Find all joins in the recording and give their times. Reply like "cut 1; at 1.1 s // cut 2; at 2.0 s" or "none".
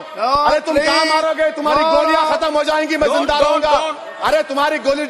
none

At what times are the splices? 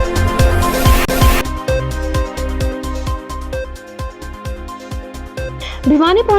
cut 1; at 1.0 s

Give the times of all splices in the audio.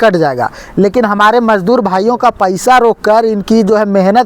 none

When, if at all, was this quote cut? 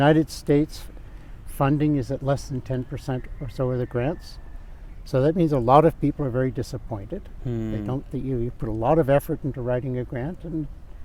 none

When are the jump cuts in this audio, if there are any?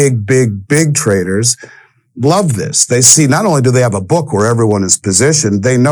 none

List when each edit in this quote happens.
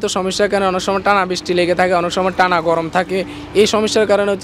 none

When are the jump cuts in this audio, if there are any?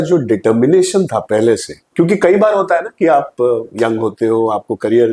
cut 1; at 1.8 s // cut 2; at 3.7 s

